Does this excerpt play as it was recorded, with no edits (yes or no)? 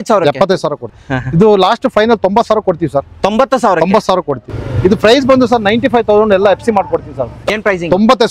no